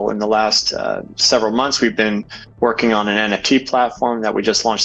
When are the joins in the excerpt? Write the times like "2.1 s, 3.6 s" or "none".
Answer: none